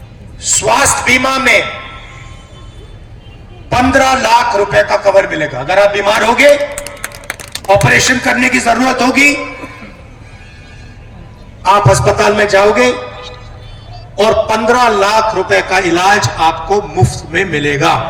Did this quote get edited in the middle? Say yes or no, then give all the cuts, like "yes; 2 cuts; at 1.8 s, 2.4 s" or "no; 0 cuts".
no; 0 cuts